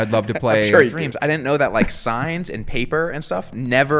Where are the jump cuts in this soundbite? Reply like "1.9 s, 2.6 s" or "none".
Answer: 0.9 s